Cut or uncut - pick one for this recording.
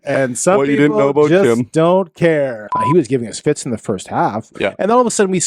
cut